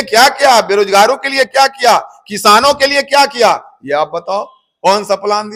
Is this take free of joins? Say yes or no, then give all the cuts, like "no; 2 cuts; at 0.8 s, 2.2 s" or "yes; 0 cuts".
yes; 0 cuts